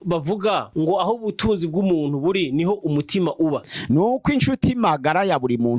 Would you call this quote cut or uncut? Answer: uncut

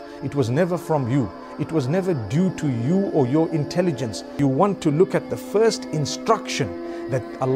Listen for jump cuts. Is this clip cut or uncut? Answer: cut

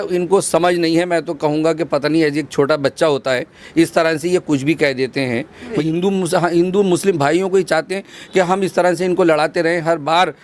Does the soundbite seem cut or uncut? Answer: cut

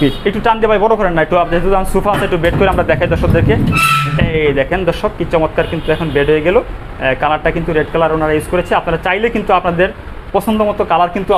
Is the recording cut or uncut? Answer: uncut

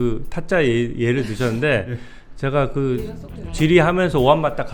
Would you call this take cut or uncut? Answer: uncut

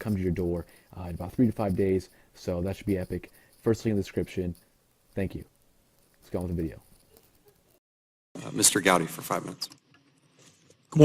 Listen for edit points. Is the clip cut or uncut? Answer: cut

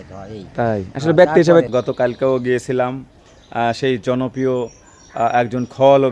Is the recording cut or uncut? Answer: cut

